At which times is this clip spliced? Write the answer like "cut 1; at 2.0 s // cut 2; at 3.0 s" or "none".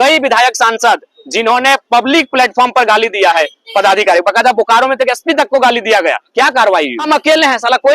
cut 1; at 7.0 s